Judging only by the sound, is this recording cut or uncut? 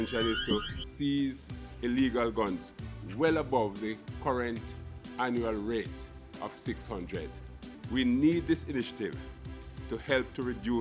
cut